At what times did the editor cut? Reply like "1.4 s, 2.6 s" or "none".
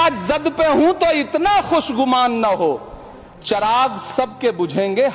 none

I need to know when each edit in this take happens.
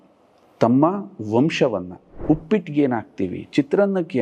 2.1 s

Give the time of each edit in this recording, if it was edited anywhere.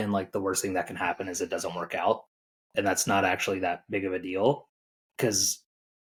none

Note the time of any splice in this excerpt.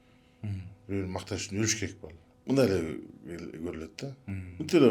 2.3 s

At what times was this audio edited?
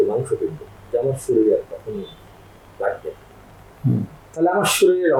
none

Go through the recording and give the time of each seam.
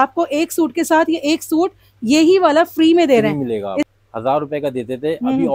3.9 s

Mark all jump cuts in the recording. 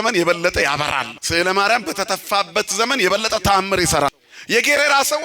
1.2 s, 4.1 s

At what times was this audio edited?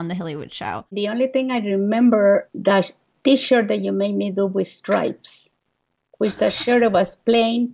0.9 s, 2.5 s

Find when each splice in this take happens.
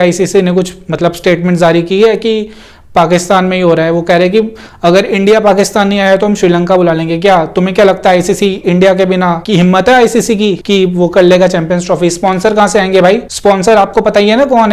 9.4 s, 10.6 s, 13.3 s

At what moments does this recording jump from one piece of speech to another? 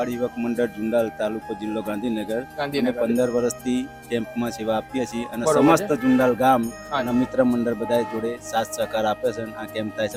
none

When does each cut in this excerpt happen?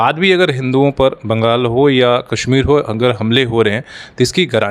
none

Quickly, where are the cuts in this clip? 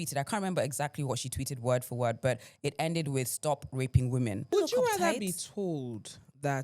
4.5 s

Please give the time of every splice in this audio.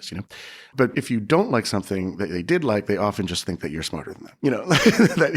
0.8 s, 4.2 s

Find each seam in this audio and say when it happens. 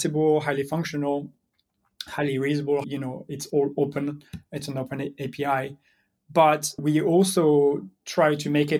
2.8 s, 6.8 s

